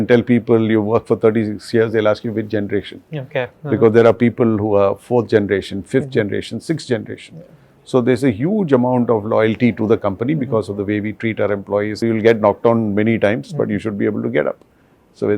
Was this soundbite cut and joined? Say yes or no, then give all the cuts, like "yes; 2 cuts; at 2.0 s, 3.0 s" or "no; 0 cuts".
yes; 1 cut; at 12.0 s